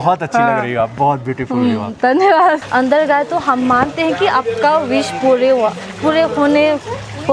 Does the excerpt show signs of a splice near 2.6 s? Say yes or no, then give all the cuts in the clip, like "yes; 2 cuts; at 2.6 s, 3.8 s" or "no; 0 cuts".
yes; 1 cut; at 2.6 s